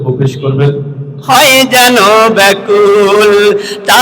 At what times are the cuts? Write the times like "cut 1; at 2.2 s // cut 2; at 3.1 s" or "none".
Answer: cut 1; at 1.1 s